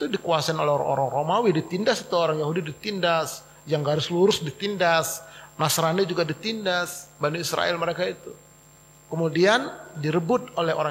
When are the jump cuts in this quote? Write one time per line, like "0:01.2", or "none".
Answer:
none